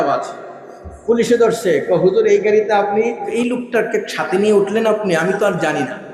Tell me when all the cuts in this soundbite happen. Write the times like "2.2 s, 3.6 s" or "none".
3.2 s